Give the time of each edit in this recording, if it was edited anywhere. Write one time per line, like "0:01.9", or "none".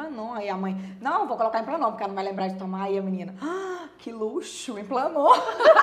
none